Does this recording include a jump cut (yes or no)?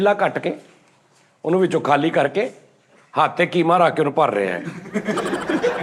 no